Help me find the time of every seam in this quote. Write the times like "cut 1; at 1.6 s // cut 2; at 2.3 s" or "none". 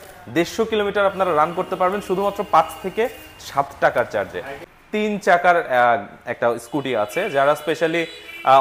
cut 1; at 4.6 s